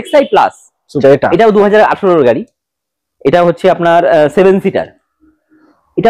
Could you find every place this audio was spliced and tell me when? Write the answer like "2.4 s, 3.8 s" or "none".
1.0 s